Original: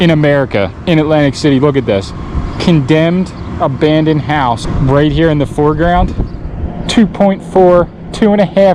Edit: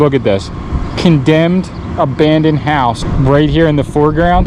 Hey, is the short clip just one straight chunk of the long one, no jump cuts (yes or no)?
yes